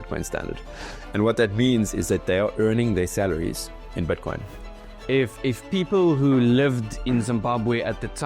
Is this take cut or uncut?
cut